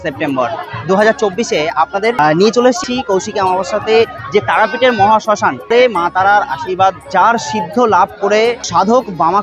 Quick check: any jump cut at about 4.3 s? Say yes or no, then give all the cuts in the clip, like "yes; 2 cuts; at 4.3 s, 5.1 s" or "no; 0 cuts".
no; 5 cuts; at 2.2 s, 2.8 s, 5.7 s, 7.1 s, 8.6 s